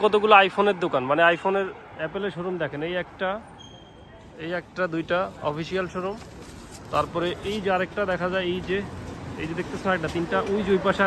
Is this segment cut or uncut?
uncut